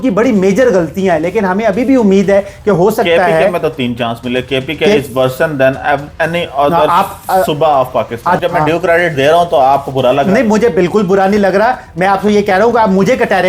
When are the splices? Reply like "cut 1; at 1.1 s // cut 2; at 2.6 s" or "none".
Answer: cut 1; at 8.4 s